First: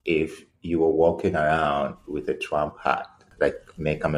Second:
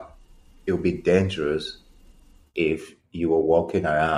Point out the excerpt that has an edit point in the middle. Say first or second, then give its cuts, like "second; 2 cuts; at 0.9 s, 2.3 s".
first; 1 cut; at 3.3 s